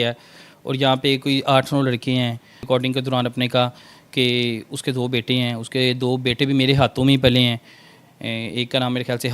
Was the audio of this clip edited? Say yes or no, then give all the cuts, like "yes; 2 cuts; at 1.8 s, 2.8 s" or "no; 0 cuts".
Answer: yes; 1 cut; at 2.6 s